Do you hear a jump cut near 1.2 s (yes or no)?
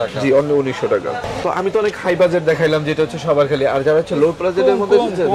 yes